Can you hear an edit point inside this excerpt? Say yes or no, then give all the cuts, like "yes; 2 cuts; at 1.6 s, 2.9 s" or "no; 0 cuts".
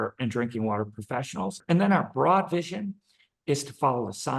yes; 1 cut; at 1.6 s